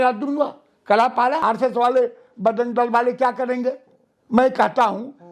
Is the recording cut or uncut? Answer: cut